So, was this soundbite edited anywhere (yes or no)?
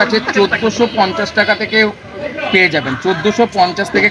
no